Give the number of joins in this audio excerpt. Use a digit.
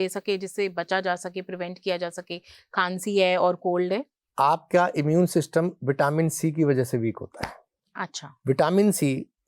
2